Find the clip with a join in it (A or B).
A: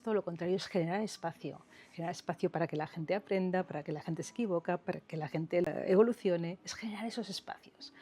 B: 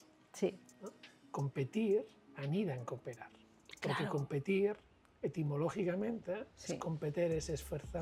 A